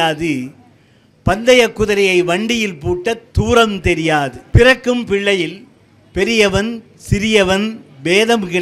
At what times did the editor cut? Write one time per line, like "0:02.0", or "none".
0:04.4